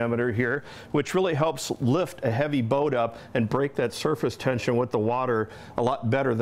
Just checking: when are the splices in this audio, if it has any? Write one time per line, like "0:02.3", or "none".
0:01.6